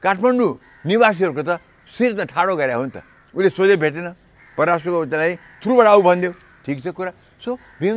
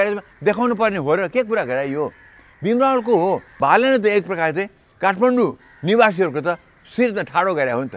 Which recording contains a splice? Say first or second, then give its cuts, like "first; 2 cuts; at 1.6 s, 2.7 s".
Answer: second; 1 cut; at 3.5 s